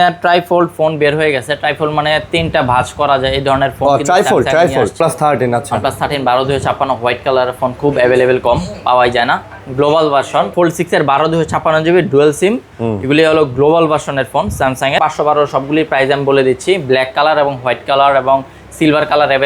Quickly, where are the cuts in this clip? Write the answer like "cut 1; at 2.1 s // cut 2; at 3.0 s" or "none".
cut 1; at 5.0 s // cut 2; at 10.5 s // cut 3; at 15.0 s